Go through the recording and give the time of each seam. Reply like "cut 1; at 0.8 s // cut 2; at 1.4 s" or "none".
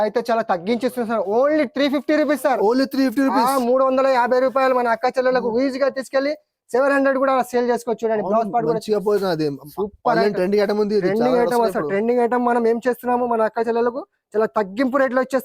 none

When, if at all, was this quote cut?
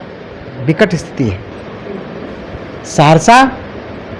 none

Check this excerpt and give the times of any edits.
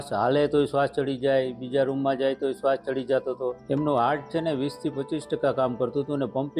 cut 1; at 3.6 s

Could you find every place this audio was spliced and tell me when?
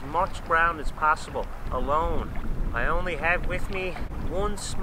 cut 1; at 2.4 s

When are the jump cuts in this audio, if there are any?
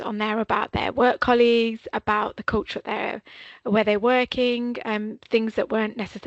none

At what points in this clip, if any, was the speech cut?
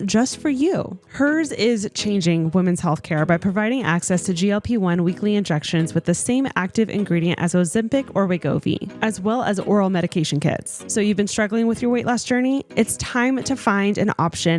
cut 1; at 10.7 s

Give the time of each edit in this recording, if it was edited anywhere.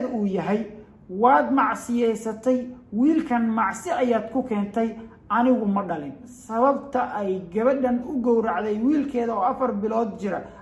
cut 1; at 6.3 s

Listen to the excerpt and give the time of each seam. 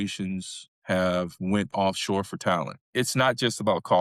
cut 1; at 2.9 s

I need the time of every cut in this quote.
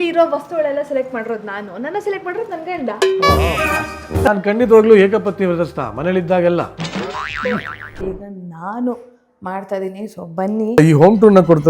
cut 1; at 4.3 s // cut 2; at 10.8 s

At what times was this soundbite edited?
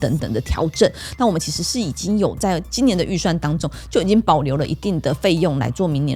none

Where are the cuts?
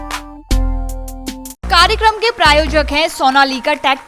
cut 1; at 1.6 s

